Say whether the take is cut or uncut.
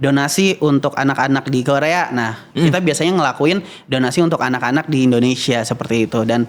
uncut